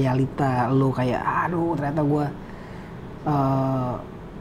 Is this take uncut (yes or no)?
yes